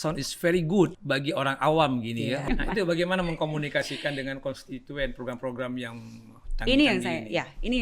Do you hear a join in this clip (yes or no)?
yes